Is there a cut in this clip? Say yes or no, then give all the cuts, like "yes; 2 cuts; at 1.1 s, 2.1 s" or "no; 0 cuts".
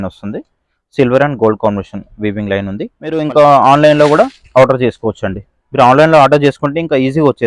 yes; 1 cut; at 3.2 s